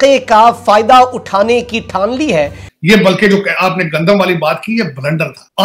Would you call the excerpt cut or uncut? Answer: cut